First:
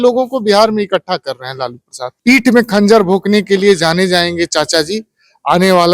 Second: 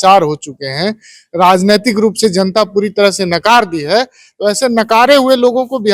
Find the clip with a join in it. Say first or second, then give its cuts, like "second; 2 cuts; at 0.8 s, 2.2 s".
first; 1 cut; at 2.2 s